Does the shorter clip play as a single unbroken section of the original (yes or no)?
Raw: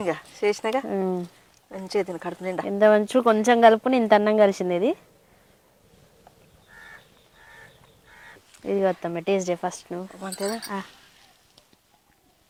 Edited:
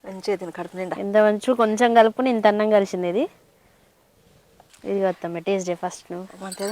no